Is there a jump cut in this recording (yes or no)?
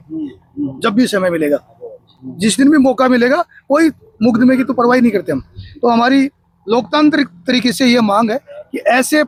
no